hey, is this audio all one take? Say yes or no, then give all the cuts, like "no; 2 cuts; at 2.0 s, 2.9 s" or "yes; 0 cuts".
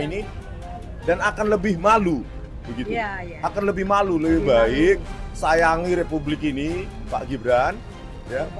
yes; 0 cuts